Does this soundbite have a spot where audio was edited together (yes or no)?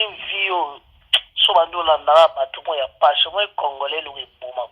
no